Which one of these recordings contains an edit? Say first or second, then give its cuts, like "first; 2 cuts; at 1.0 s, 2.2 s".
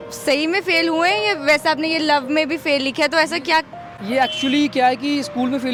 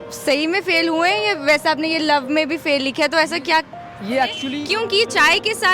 second; 1 cut; at 4.4 s